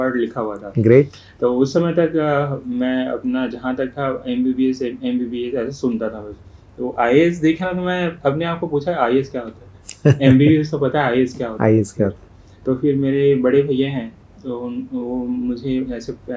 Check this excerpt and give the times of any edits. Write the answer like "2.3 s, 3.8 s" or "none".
none